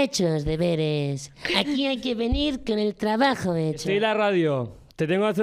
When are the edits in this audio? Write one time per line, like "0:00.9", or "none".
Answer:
0:03.8